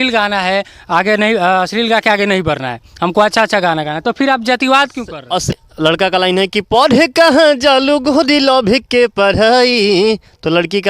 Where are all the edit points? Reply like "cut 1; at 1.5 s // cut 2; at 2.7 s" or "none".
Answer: cut 1; at 5.5 s